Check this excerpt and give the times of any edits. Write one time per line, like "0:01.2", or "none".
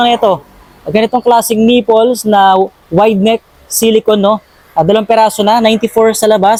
none